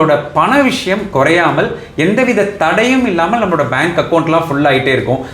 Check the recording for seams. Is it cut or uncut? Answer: uncut